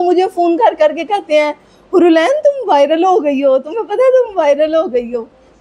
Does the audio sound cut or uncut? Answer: uncut